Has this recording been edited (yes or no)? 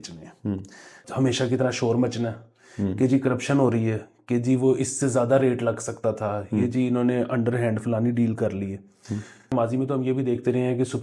yes